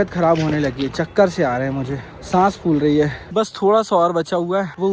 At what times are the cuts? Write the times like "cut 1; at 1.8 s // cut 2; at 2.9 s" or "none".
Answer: none